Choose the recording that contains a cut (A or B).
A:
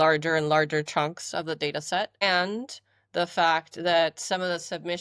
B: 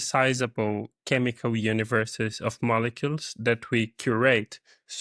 A